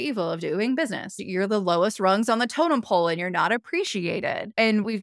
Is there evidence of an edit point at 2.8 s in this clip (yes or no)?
no